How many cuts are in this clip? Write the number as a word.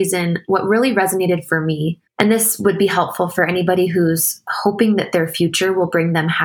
one